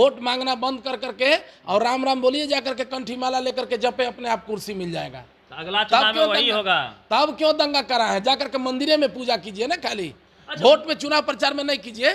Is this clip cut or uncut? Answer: uncut